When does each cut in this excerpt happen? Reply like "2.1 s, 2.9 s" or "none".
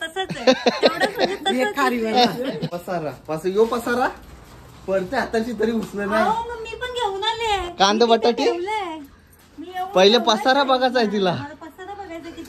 2.7 s